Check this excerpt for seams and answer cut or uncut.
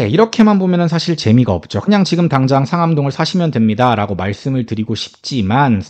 uncut